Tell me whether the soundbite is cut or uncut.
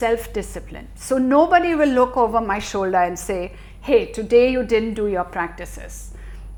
uncut